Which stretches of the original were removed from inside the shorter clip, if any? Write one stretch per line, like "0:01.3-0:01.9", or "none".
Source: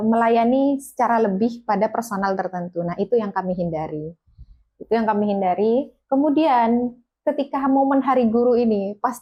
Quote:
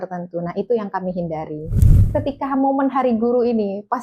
0:04.3-0:07.0